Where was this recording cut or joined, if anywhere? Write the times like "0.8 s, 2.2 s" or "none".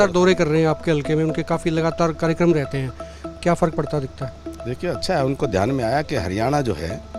none

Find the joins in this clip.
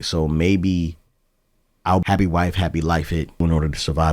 2.0 s, 3.4 s

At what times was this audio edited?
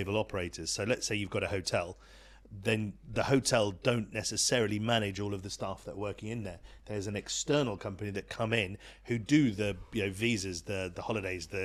none

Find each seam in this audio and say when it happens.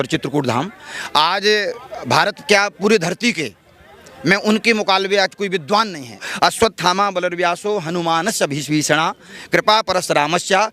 6.2 s

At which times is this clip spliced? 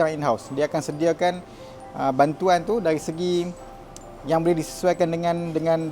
none

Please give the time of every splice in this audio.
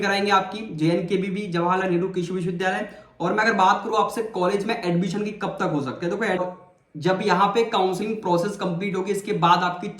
6.4 s

